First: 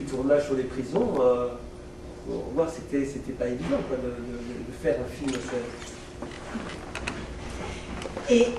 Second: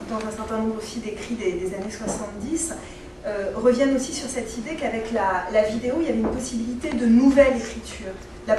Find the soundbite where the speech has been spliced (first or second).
second